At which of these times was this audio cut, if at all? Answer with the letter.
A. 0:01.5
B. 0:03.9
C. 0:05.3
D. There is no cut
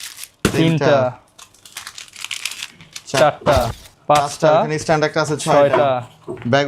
B